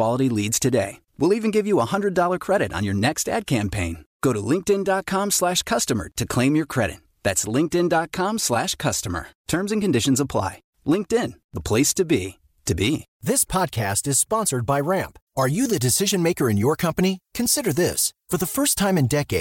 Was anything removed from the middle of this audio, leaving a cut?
yes; 1 cut; at 13.1 s

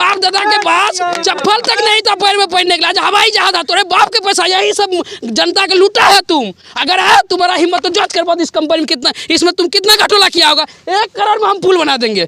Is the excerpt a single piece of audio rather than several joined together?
yes; 0 cuts

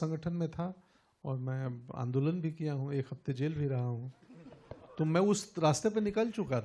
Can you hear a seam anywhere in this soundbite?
no; 0 cuts

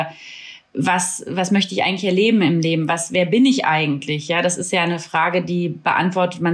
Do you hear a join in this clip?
no; 0 cuts

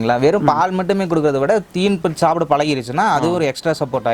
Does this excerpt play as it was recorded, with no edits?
yes; 0 cuts

